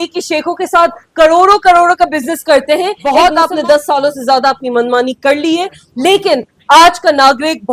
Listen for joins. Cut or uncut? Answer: cut